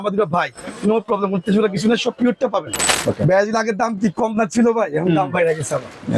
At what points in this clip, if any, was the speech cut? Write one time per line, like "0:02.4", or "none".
0:02.8

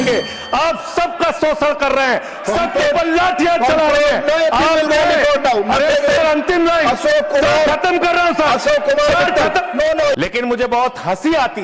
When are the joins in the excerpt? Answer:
0:10.1

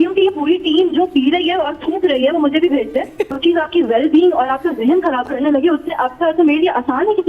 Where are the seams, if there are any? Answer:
0:03.3

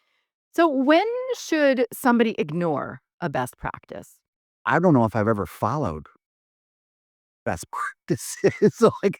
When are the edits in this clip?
0:04.6

